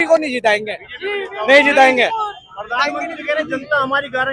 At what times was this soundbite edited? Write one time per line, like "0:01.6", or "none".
none